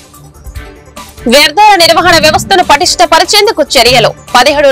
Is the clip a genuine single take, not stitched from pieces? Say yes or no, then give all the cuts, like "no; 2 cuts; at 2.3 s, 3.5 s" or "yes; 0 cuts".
no; 1 cut; at 1.2 s